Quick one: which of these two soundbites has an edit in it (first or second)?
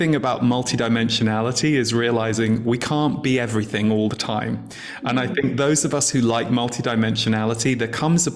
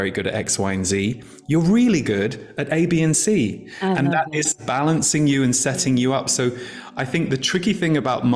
second